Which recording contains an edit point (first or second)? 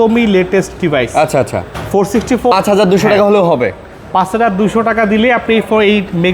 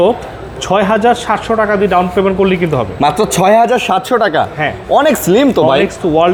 first